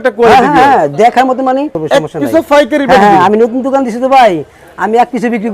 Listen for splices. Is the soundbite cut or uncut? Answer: cut